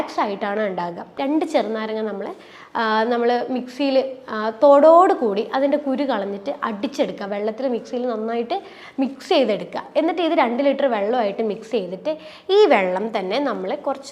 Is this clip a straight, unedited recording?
no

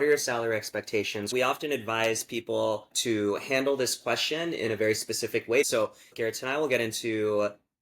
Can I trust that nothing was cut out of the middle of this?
no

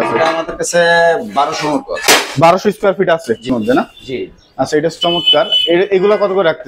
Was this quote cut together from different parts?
yes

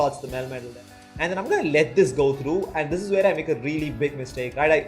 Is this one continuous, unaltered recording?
no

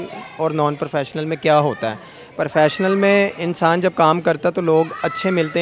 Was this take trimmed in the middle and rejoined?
no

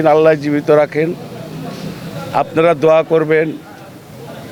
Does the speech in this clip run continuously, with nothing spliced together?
yes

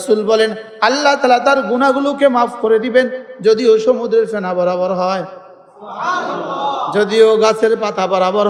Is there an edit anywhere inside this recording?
no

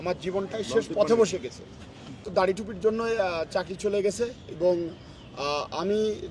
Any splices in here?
yes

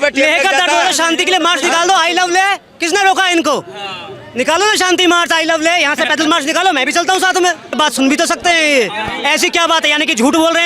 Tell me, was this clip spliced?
yes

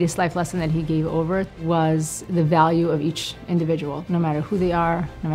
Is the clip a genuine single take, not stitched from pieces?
no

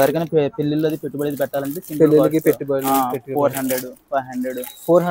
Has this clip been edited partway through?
no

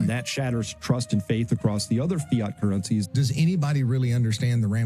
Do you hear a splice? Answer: yes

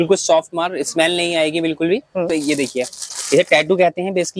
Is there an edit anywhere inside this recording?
yes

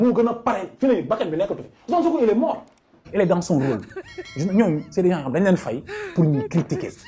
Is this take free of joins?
no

